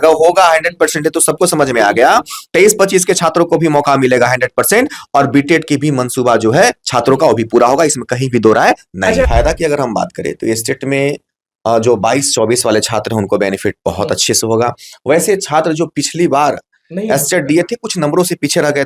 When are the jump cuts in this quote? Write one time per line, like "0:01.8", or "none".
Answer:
0:09.3